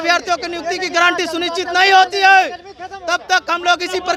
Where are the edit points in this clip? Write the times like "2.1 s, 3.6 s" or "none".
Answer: none